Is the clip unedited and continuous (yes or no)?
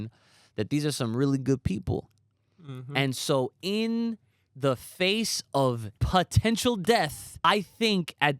no